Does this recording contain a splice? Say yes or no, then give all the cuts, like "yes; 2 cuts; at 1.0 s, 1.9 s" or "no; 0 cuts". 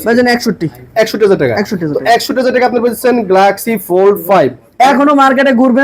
no; 0 cuts